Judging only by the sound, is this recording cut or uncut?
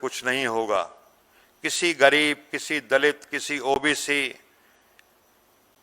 uncut